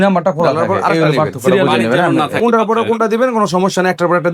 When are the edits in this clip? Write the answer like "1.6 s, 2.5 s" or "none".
2.1 s